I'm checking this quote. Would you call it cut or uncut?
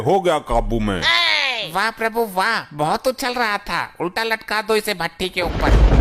uncut